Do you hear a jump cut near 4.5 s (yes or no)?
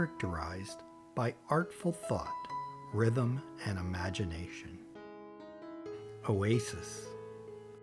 yes